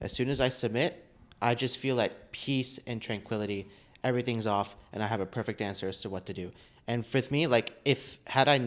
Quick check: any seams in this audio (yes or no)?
no